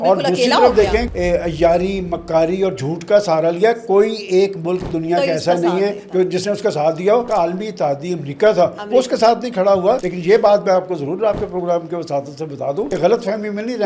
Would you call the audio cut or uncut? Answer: cut